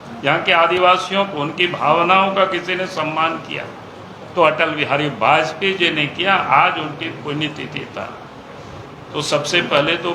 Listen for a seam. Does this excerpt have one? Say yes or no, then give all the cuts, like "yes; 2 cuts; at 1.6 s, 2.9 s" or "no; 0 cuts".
no; 0 cuts